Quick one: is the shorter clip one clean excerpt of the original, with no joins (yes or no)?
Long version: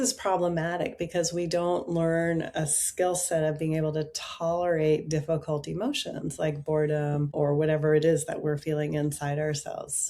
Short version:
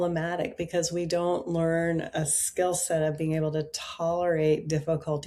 yes